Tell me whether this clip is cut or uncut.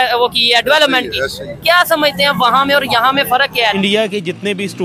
cut